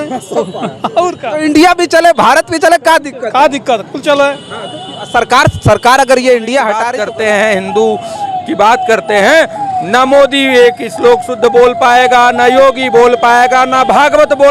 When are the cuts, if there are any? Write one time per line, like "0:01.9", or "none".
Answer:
0:06.9